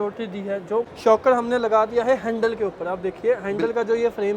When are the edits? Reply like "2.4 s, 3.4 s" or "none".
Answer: 0.9 s